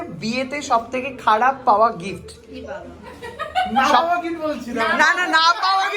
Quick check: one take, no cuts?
yes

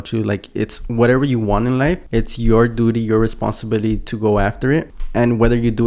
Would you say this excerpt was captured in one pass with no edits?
no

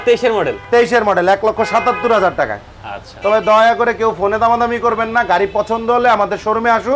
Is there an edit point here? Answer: no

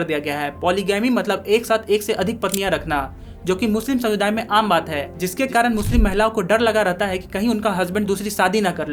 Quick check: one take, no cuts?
yes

